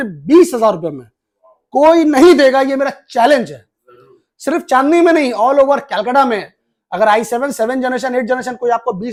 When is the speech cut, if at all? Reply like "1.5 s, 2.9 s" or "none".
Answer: none